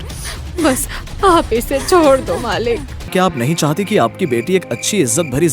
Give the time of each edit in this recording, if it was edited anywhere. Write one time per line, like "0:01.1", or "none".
0:03.1